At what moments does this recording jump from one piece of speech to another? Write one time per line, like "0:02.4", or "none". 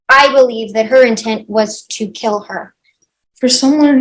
0:03.0